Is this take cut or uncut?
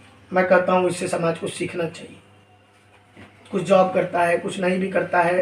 uncut